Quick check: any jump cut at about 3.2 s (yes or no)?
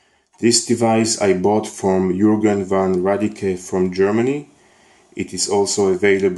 yes